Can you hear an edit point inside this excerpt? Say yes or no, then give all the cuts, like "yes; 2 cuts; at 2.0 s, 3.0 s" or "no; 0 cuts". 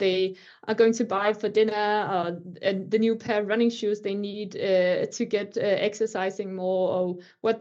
no; 0 cuts